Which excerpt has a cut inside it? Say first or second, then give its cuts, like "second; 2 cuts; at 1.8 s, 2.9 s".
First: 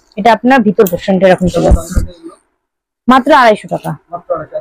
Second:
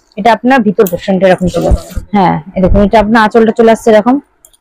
second; 1 cut; at 1.9 s